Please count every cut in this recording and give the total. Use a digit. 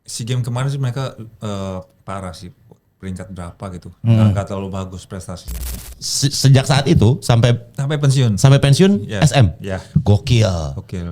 1